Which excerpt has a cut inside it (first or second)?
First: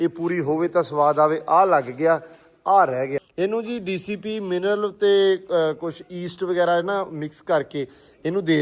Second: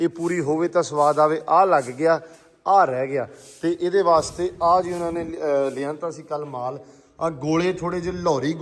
first